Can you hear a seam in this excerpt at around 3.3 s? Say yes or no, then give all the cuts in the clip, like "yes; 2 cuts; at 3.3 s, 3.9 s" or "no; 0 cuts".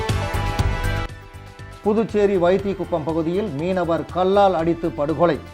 no; 1 cut; at 1.1 s